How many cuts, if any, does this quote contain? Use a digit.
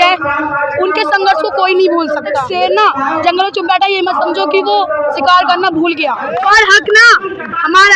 2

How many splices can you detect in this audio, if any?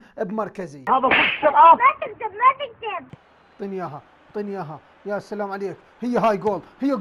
1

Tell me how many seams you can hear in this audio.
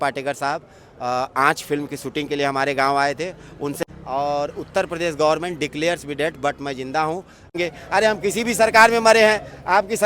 2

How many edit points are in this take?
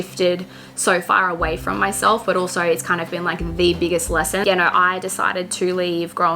1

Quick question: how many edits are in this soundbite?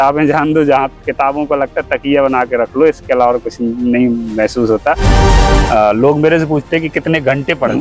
1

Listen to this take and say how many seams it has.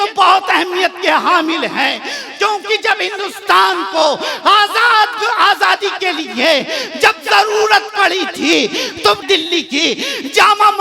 1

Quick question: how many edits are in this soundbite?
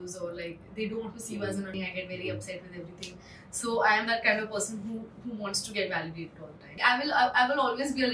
2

